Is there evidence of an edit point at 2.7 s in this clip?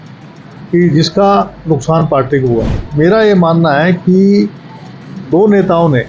yes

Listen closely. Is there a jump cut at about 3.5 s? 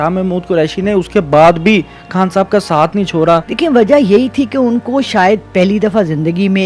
yes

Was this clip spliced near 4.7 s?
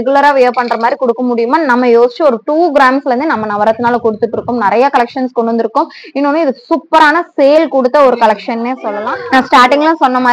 no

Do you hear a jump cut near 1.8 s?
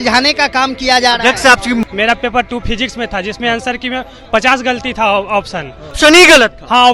yes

